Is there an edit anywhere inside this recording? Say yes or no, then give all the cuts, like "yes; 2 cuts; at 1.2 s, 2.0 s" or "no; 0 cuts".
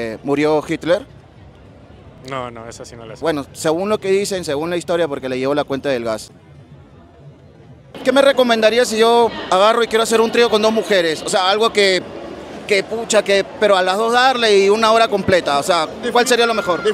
no; 0 cuts